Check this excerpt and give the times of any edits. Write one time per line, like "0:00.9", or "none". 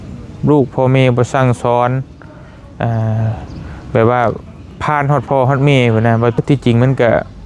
0:06.4